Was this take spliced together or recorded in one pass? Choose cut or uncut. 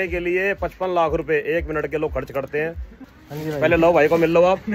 cut